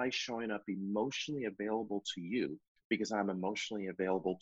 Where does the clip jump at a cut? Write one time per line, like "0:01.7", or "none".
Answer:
none

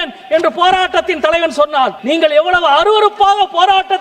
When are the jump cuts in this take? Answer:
0:02.0

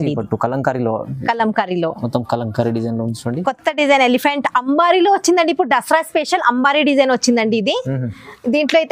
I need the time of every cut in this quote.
none

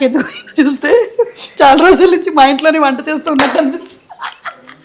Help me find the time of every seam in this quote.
none

